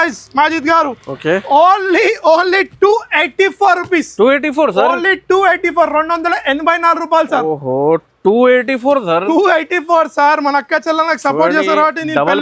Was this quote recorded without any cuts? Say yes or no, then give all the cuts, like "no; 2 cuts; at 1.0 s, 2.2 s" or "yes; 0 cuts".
yes; 0 cuts